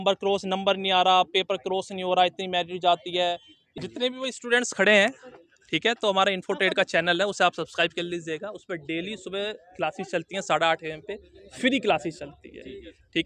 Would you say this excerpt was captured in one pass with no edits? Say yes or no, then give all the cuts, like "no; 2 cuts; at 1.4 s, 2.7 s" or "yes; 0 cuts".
no; 1 cut; at 3.8 s